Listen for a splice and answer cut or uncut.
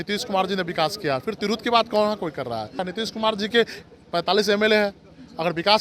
cut